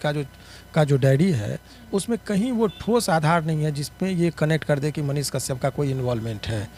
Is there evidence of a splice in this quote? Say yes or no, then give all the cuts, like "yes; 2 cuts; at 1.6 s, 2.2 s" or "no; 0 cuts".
no; 0 cuts